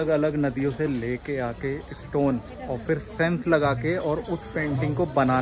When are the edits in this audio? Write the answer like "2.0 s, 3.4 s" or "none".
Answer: none